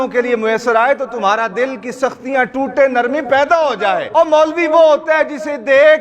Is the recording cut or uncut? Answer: cut